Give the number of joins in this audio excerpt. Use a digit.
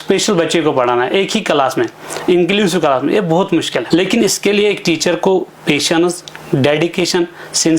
1